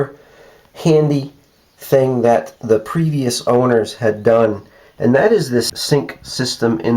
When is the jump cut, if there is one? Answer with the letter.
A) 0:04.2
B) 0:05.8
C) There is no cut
B